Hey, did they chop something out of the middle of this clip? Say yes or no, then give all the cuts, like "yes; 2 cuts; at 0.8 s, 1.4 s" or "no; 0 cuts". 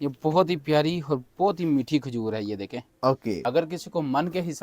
yes; 1 cut; at 3.4 s